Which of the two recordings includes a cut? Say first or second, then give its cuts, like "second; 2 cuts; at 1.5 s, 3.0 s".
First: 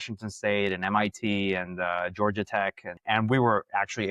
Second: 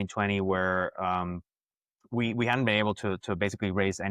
first; 1 cut; at 2.9 s